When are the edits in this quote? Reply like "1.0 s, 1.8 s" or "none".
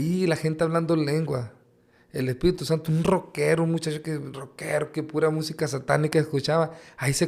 none